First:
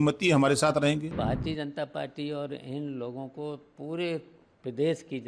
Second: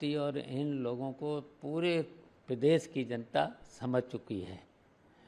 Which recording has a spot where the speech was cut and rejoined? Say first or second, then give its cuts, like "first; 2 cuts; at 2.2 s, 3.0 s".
first; 1 cut; at 1.2 s